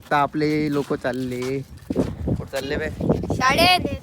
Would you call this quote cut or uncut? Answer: uncut